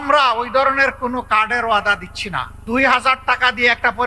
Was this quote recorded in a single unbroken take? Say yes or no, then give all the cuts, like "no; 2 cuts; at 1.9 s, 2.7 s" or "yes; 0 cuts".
no; 1 cut; at 2.5 s